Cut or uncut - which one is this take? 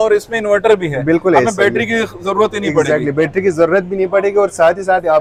uncut